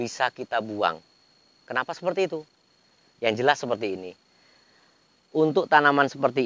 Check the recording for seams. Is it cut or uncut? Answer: uncut